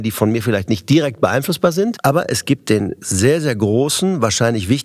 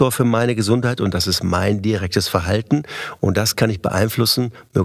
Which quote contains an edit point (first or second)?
first